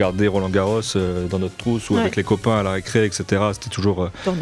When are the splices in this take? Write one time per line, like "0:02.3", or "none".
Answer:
none